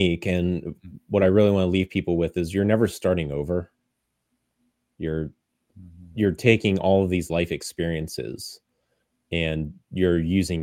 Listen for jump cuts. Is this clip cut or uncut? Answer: uncut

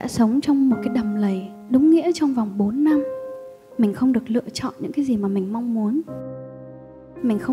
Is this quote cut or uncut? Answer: uncut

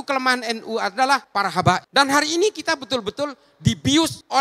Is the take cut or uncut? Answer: cut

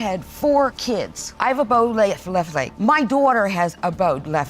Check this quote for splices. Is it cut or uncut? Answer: cut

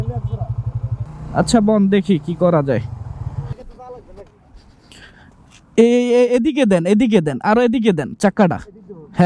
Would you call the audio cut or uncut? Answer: cut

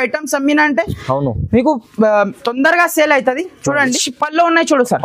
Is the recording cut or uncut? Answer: cut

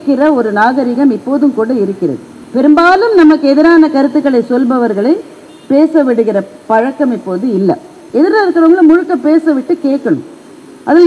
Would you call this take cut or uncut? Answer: cut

